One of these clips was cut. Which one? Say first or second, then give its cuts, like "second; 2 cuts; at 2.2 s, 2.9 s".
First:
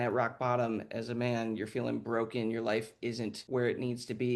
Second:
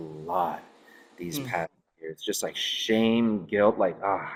first; 1 cut; at 3.4 s